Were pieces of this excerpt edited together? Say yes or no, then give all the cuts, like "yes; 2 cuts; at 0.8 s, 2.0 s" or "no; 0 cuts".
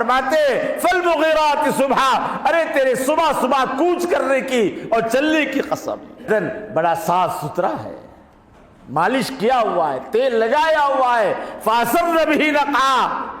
yes; 1 cut; at 6.3 s